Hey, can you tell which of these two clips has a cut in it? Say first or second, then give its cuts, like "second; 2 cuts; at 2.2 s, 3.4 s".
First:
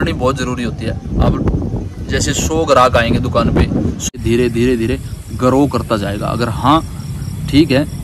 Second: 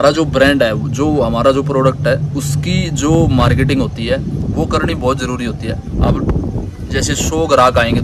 first; 1 cut; at 4.2 s